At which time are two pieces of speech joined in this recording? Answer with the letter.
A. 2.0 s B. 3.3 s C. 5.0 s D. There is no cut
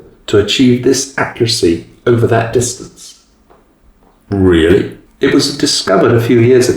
C